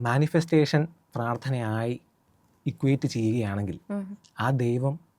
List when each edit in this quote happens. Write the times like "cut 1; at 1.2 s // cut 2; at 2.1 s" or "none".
none